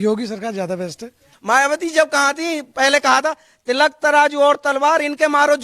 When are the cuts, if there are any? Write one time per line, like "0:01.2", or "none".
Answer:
0:01.3